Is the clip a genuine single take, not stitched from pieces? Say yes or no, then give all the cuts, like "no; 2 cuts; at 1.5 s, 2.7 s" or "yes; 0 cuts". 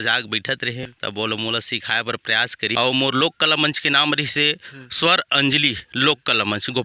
no; 2 cuts; at 0.9 s, 2.7 s